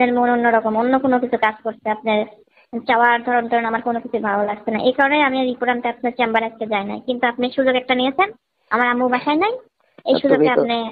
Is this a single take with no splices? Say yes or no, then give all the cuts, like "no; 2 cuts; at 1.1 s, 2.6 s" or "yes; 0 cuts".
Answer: yes; 0 cuts